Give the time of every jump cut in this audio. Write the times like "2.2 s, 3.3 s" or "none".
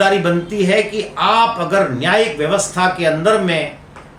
none